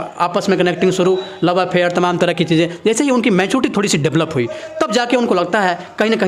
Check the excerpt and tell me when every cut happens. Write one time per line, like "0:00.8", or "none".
none